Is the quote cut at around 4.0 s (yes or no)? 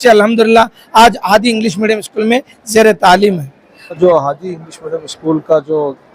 yes